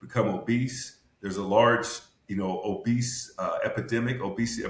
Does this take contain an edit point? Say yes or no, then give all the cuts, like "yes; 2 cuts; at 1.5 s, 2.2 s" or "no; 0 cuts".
no; 0 cuts